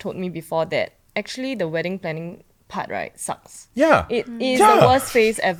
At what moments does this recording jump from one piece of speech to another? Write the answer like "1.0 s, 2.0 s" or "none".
none